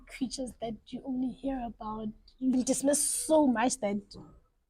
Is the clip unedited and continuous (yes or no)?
no